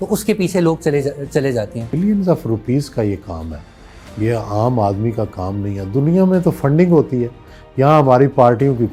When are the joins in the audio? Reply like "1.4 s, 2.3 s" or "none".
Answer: 1.9 s